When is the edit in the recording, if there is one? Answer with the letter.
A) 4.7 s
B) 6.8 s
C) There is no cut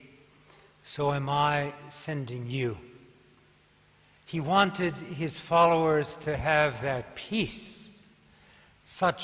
A